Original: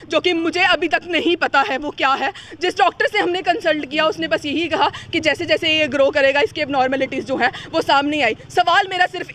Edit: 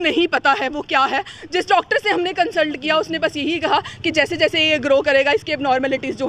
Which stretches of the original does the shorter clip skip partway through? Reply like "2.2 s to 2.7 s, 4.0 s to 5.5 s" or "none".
none